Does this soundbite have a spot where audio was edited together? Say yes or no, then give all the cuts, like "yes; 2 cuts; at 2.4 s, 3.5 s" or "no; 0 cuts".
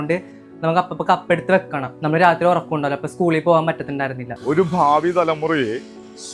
yes; 2 cuts; at 1.9 s, 4.3 s